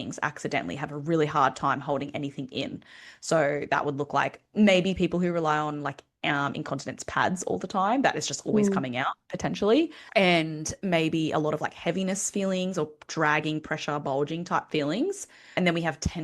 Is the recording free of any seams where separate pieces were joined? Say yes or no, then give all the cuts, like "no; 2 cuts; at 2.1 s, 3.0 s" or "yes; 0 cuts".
no; 2 cuts; at 10.0 s, 15.5 s